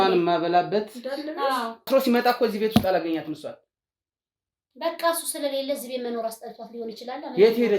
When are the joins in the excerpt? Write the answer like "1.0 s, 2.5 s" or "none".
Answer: 1.9 s